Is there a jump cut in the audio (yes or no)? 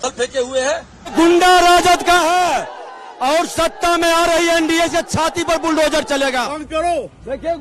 yes